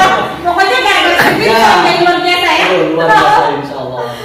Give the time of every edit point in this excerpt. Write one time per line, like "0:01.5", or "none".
none